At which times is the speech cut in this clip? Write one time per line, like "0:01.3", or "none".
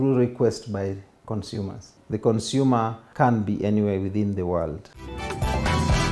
0:04.8